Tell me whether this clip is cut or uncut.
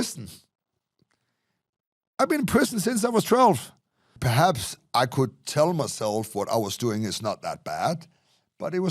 cut